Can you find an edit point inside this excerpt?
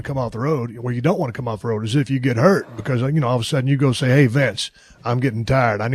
yes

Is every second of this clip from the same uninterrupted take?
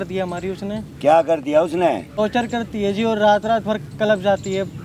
no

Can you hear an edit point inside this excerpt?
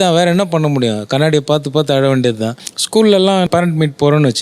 yes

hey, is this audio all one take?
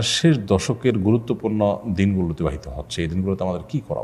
yes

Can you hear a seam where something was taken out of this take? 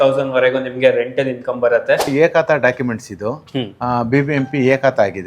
yes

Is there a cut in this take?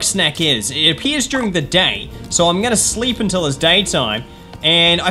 no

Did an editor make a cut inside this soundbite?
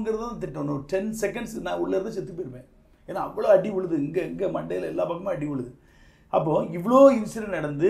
no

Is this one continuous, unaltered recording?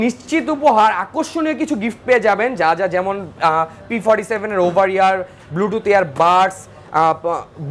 yes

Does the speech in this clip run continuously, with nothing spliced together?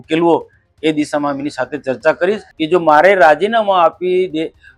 no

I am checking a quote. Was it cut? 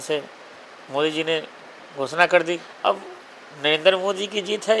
yes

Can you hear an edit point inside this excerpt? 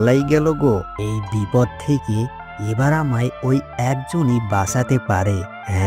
yes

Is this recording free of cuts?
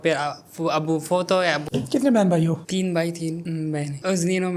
yes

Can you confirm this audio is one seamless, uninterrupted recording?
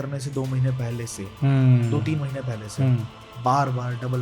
yes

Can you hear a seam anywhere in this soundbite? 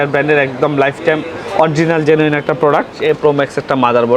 yes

